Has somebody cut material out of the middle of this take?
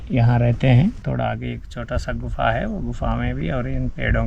yes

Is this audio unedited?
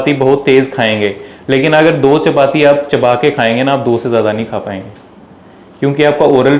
yes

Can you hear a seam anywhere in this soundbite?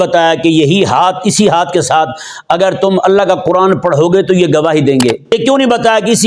yes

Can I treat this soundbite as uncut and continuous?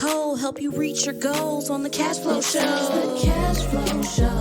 yes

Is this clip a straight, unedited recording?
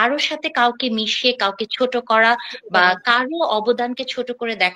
yes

